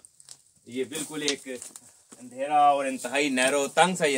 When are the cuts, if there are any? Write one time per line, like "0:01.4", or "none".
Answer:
none